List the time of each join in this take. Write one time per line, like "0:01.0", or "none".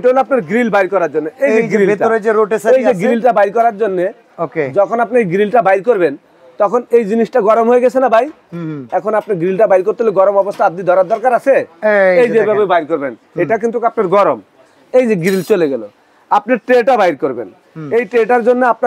none